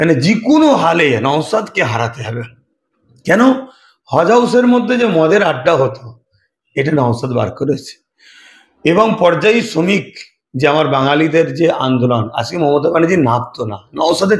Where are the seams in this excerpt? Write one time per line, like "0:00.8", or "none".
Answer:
none